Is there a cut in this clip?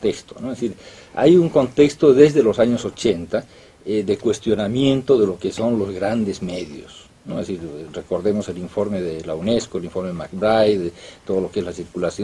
yes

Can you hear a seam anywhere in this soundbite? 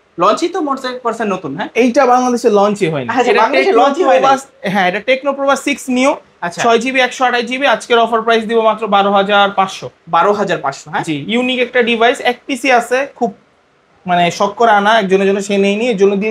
no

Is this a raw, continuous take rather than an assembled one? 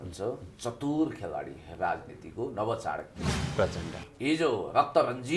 no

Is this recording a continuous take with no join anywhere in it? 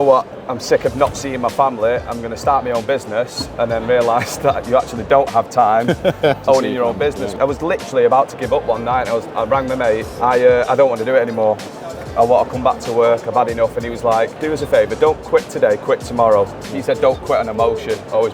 no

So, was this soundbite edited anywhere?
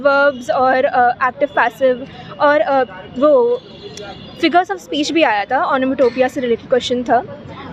no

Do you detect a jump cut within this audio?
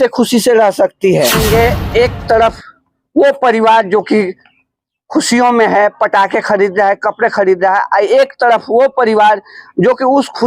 yes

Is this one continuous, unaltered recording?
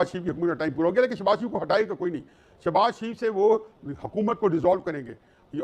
yes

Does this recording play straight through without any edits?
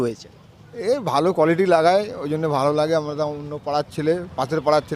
yes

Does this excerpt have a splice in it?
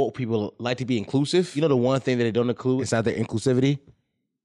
yes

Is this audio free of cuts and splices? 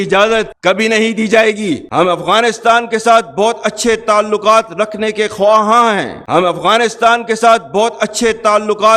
no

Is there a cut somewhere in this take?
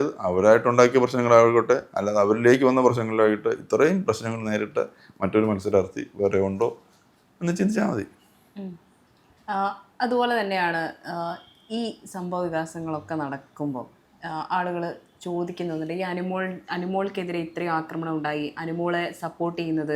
no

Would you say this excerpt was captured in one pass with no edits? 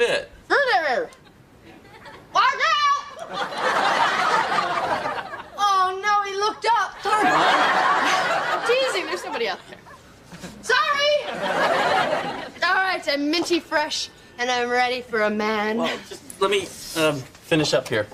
yes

